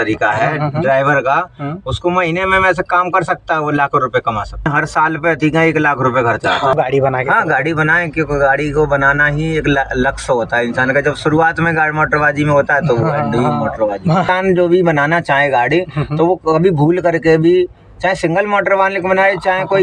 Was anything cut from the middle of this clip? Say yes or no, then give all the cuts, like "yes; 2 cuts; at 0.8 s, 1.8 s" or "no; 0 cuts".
yes; 3 cuts; at 4.7 s, 6.7 s, 14.3 s